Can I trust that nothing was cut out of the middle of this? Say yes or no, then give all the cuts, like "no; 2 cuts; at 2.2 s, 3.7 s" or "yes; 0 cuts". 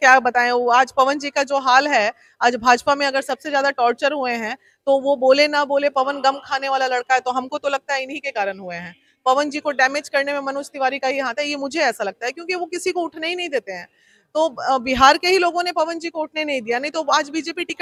yes; 0 cuts